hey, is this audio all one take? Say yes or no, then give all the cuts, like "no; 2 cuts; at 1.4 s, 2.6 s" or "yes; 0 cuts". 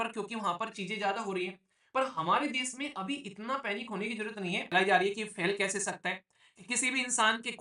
no; 1 cut; at 4.6 s